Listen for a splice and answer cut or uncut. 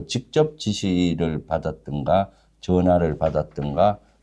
uncut